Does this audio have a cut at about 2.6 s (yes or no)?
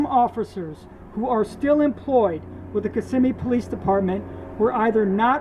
no